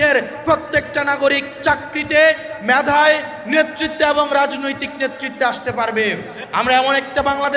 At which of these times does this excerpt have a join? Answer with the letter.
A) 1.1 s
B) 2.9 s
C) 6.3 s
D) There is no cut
C